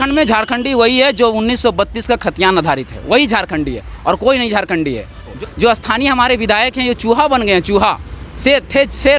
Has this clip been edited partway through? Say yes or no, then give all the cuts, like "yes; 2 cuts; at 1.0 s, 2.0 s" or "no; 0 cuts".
yes; 1 cut; at 5.3 s